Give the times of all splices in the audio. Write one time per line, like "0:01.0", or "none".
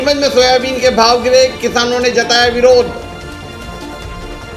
0:02.9

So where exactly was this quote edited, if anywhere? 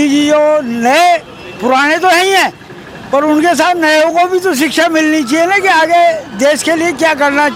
none

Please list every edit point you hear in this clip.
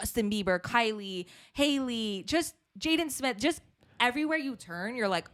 none

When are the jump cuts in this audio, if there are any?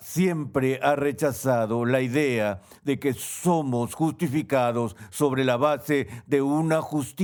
none

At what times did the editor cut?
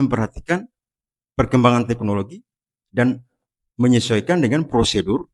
none

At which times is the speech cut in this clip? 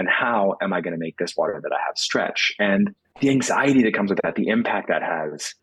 0:03.0

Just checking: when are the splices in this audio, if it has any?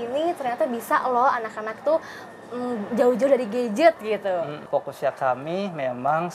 0:04.7

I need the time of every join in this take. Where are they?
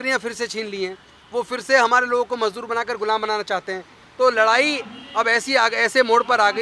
none

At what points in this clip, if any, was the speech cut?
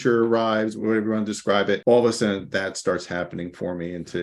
0:00.8
0:01.8
0:02.4

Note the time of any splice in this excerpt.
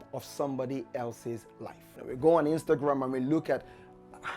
0:01.9

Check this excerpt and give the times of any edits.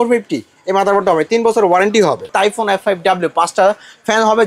0:02.2

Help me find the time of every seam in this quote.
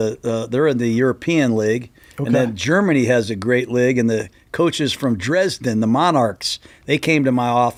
none

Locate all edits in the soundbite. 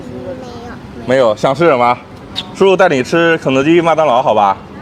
none

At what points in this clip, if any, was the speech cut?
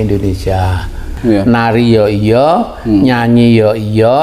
0:01.1

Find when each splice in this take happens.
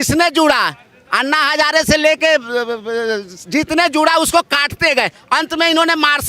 none

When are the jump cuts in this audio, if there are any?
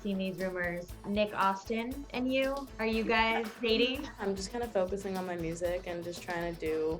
0:01.0
0:02.0
0:02.7
0:03.5
0:04.2

